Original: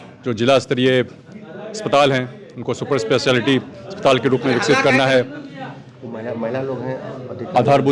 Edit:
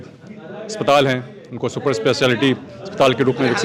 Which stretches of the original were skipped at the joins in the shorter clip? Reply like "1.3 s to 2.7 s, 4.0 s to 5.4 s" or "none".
none